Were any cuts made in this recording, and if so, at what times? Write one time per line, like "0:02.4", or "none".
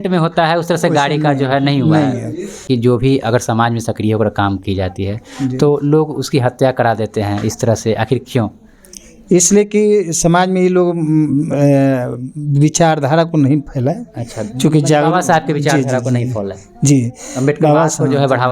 0:02.6